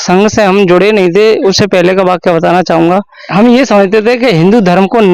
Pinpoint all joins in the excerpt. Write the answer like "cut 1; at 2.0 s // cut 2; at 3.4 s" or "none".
cut 1; at 3.2 s